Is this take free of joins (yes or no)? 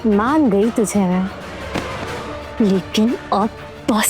no